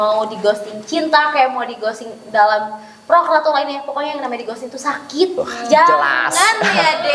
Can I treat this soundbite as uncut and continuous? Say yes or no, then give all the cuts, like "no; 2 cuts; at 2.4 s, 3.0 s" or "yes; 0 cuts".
yes; 0 cuts